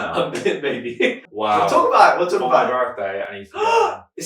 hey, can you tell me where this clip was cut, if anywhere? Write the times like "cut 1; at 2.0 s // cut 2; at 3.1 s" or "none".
cut 1; at 1.2 s